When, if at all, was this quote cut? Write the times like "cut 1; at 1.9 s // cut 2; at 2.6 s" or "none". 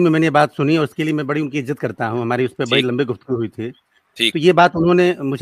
none